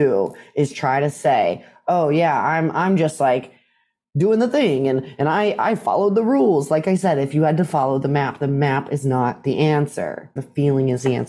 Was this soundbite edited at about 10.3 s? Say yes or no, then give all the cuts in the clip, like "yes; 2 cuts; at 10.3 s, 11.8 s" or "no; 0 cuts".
yes; 1 cut; at 10.3 s